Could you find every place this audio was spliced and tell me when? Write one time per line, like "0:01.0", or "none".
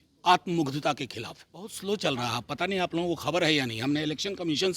0:01.7